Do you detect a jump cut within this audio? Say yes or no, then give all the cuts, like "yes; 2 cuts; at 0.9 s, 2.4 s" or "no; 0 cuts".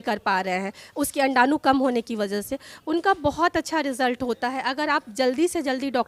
no; 0 cuts